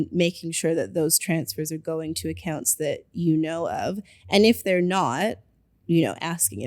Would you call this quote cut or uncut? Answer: uncut